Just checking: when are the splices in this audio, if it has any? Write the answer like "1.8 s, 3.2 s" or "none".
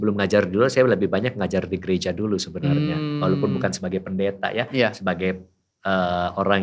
none